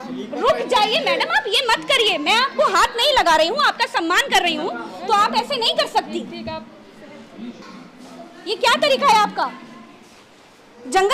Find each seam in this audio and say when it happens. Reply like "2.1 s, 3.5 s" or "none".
7.6 s